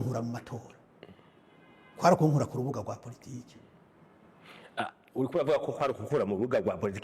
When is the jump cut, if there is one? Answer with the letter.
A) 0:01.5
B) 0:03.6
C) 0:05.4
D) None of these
D